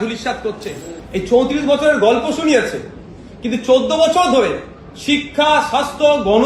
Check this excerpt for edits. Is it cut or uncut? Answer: cut